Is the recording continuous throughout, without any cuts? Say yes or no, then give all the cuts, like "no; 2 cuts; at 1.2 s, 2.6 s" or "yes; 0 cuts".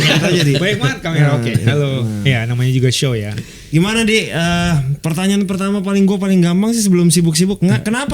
no; 1 cut; at 3.3 s